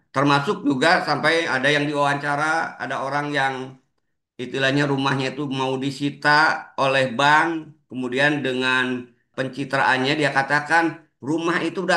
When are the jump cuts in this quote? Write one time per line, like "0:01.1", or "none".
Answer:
0:09.3